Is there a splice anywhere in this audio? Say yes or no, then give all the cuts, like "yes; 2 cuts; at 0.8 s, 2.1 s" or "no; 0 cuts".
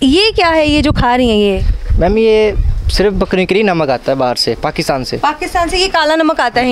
yes; 1 cut; at 5.1 s